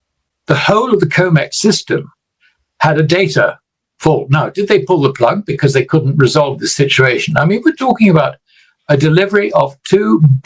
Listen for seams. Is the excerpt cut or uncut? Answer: uncut